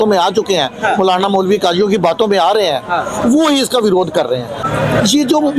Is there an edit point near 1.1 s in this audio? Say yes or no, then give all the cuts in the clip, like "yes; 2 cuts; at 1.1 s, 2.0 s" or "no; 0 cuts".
no; 1 cut; at 4.6 s